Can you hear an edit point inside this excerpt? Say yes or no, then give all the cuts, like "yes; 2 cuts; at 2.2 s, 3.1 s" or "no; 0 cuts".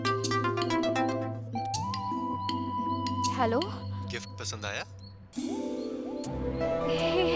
no; 0 cuts